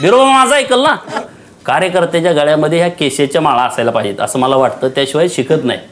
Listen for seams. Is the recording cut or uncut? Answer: cut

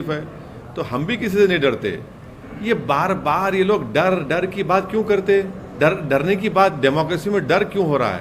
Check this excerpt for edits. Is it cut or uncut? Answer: cut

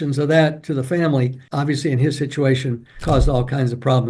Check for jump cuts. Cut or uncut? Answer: cut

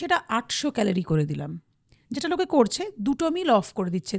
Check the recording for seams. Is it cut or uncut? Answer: uncut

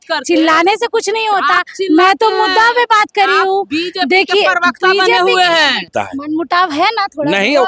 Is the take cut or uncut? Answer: cut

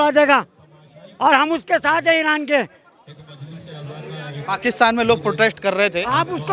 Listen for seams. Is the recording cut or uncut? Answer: uncut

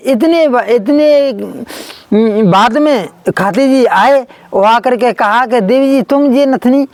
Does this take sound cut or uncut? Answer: uncut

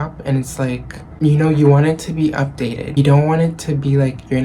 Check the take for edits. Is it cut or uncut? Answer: cut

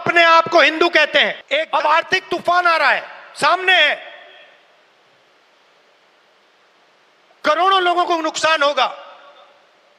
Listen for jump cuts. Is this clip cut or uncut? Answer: cut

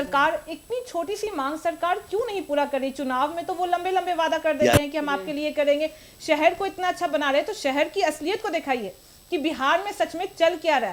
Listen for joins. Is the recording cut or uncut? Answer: uncut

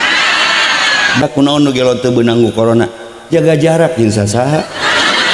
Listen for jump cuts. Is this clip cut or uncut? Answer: cut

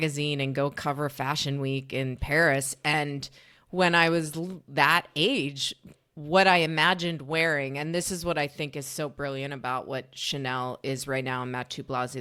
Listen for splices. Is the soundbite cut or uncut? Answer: uncut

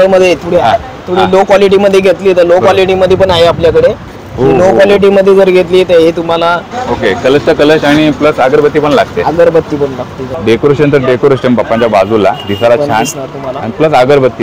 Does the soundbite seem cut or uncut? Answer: cut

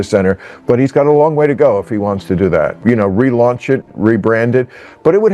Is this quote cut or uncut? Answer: cut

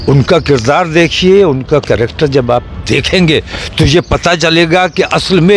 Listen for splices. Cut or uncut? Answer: uncut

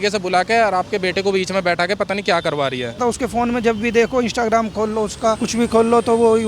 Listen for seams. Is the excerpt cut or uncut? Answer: cut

